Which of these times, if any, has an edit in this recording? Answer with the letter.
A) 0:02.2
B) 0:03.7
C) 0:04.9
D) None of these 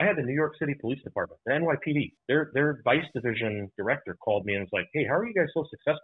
A